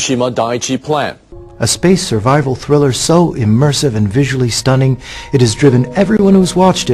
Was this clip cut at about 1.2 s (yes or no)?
no